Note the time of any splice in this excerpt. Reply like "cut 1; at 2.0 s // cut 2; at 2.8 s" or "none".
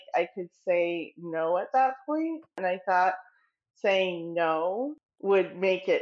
cut 1; at 2.6 s // cut 2; at 5.0 s